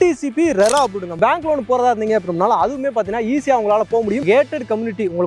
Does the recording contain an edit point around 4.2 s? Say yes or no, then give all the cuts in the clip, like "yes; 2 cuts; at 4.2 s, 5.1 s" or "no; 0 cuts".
yes; 2 cuts; at 1.2 s, 4.2 s